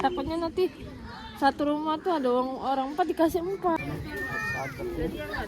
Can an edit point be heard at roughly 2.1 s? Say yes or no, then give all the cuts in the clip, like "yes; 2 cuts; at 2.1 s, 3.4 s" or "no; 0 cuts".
no; 1 cut; at 3.8 s